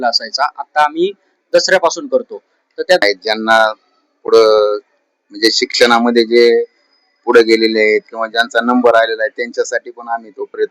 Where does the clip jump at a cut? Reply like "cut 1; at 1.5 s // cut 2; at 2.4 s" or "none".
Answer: cut 1; at 3.0 s